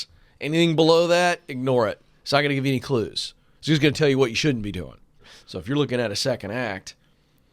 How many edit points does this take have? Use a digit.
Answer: 1